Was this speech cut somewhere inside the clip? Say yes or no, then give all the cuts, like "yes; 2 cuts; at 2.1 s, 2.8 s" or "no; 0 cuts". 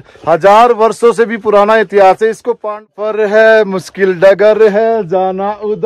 yes; 1 cut; at 2.8 s